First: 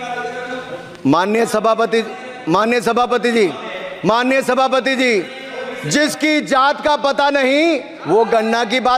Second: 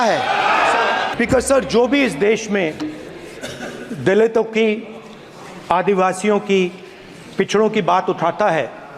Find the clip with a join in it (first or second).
second